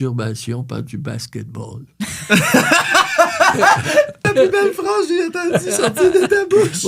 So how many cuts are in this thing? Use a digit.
1